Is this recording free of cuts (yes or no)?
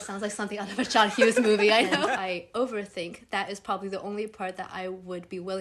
no